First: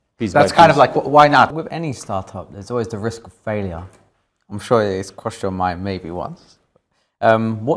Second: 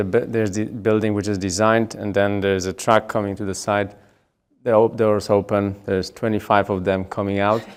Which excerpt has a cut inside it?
first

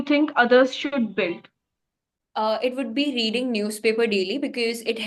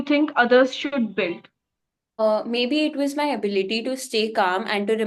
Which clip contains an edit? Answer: second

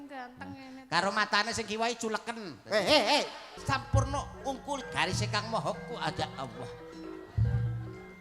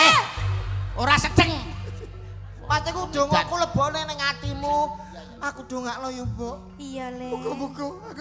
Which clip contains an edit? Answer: first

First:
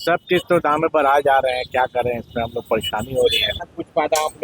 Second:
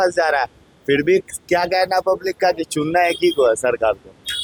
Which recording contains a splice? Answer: first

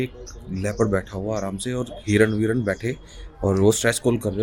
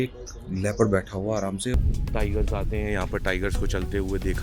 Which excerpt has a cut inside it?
second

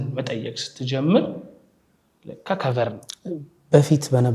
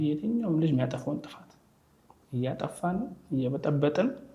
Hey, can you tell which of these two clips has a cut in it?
first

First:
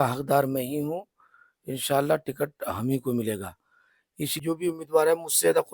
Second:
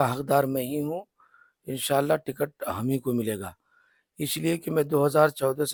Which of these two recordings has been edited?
first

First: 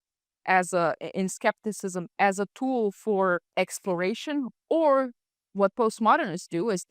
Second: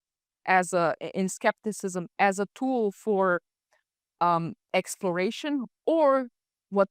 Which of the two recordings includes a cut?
first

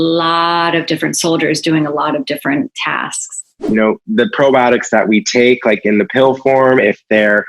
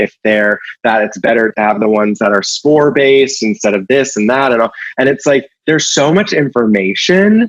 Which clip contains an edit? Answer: first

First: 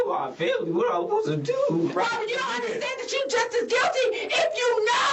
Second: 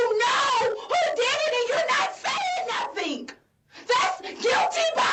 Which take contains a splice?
first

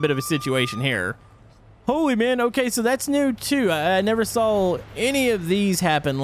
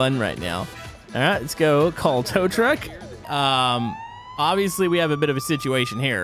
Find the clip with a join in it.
second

